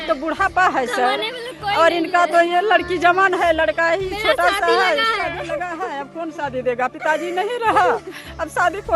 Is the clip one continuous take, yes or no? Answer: yes